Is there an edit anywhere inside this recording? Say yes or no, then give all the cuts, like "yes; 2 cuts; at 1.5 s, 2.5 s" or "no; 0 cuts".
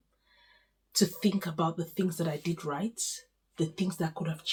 no; 0 cuts